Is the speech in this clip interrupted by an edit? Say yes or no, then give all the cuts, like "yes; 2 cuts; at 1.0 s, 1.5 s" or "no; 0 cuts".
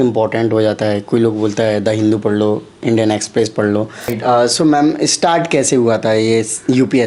yes; 1 cut; at 4.1 s